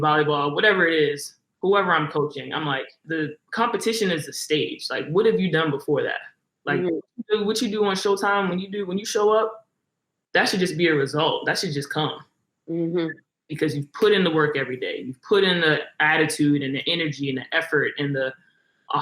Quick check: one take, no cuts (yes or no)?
no